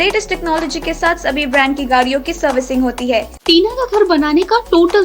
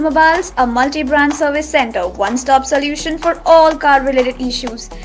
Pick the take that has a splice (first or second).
first